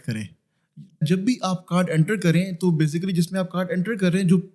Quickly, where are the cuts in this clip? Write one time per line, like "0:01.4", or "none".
0:01.0